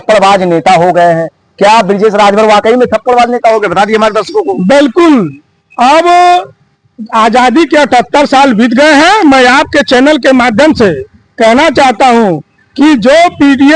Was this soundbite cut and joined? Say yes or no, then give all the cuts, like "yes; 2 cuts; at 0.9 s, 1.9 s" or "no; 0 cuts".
no; 0 cuts